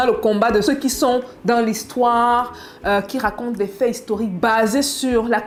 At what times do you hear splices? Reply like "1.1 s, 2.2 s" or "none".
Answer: none